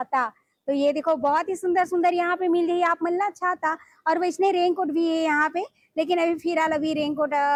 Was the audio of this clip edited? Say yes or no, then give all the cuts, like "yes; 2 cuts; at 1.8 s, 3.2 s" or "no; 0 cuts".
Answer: no; 0 cuts